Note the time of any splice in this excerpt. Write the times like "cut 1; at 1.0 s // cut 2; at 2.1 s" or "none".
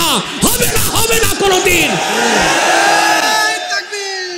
none